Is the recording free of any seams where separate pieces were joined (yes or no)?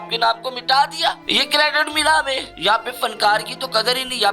no